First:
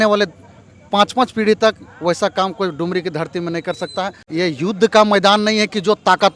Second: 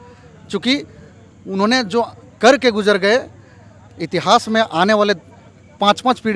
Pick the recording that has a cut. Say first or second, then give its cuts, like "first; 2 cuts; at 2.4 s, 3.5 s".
first; 1 cut; at 4.2 s